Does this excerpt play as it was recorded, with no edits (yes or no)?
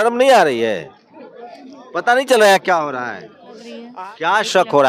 no